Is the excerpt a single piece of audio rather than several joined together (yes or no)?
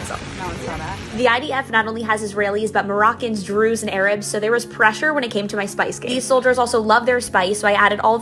yes